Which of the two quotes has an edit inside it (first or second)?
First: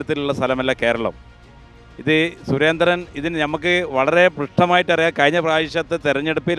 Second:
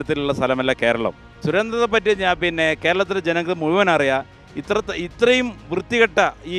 second